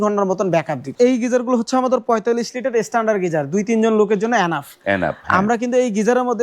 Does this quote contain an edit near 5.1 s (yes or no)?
no